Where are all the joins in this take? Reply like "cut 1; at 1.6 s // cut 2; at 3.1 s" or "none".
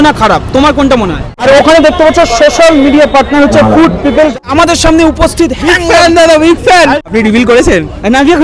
cut 1; at 1.4 s // cut 2; at 4.3 s // cut 3; at 7.0 s